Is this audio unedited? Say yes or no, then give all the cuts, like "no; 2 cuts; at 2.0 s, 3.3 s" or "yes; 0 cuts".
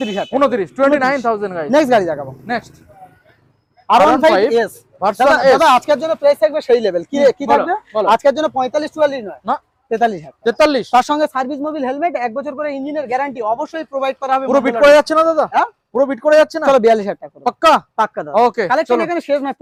yes; 0 cuts